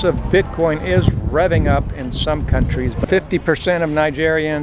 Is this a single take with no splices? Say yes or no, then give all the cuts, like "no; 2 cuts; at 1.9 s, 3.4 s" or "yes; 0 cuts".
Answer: yes; 0 cuts